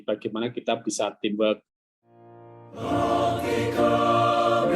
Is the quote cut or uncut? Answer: cut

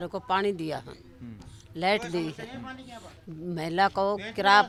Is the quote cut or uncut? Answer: uncut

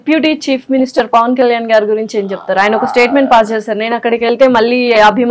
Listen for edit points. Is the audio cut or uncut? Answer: uncut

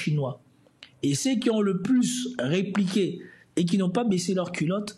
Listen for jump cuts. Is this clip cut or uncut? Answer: uncut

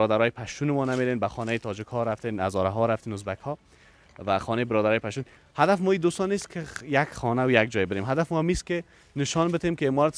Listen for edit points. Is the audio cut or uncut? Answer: uncut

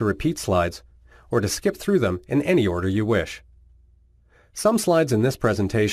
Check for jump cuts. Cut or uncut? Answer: uncut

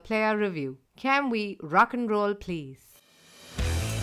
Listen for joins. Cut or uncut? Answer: uncut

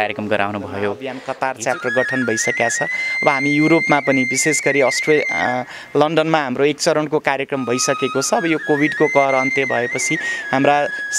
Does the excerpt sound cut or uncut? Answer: cut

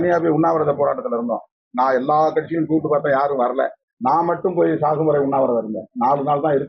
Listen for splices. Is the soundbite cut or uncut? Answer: cut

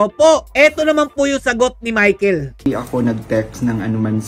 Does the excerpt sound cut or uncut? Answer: uncut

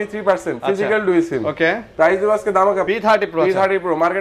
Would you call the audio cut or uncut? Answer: cut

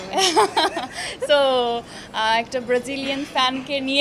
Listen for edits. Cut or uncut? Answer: uncut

